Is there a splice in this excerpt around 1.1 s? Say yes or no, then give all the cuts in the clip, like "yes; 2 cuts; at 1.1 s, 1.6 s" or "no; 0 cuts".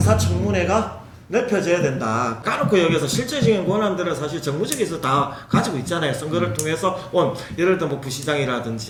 no; 0 cuts